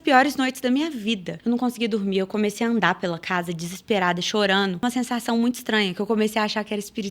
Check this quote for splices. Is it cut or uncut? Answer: cut